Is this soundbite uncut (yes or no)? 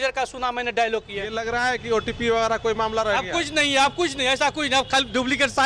no